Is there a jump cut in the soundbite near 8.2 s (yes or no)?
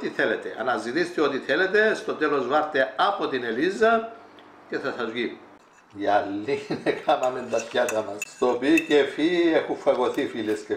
yes